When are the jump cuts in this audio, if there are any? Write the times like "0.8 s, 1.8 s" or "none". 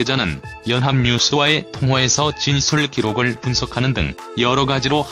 3.8 s